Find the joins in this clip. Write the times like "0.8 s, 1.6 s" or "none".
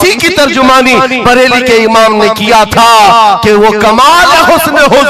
none